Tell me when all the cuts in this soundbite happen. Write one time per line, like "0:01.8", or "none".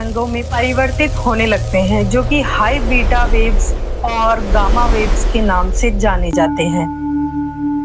none